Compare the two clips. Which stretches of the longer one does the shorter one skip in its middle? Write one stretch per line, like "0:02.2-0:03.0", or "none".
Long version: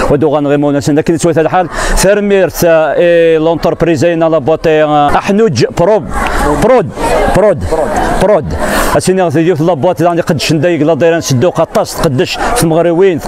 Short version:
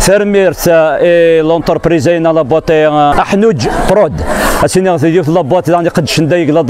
0:05.6-0:08.0